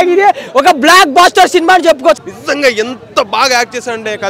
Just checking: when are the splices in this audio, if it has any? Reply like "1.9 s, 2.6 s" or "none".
2.2 s